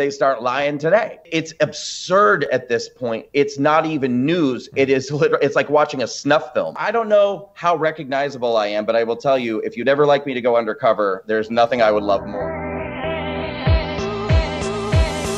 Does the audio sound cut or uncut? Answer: cut